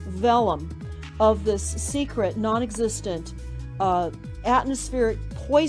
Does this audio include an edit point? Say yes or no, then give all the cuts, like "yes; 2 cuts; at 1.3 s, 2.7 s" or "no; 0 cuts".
no; 0 cuts